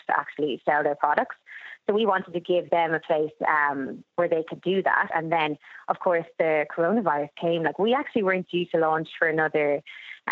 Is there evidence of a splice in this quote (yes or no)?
yes